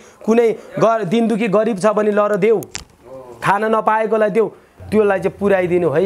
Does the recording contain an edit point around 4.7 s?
yes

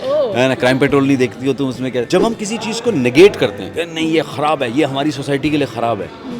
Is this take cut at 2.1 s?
yes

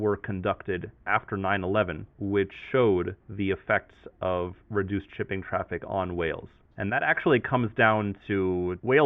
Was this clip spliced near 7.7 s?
no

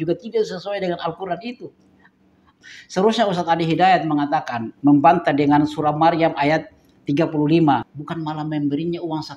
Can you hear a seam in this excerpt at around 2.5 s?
yes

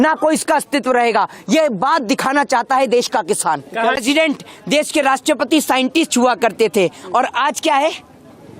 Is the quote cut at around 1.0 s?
no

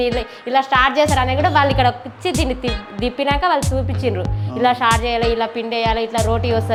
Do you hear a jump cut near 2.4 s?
no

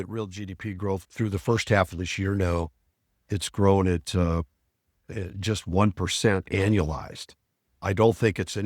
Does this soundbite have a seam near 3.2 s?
no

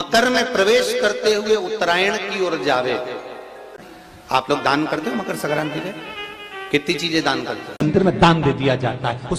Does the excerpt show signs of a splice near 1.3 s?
no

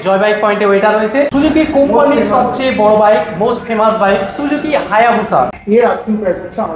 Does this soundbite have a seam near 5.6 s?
yes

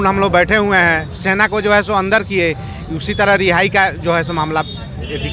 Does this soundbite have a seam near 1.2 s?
no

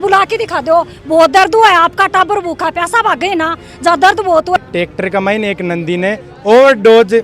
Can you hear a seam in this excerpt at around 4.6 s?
yes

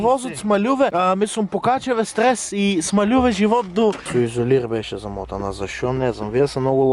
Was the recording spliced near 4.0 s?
yes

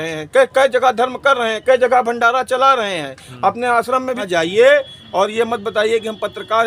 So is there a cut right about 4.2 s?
yes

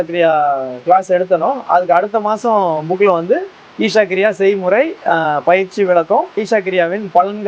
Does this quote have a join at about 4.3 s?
no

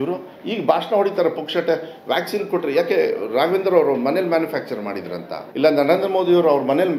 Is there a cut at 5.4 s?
yes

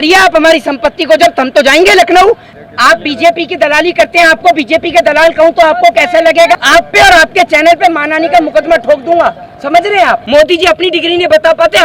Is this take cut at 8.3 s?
no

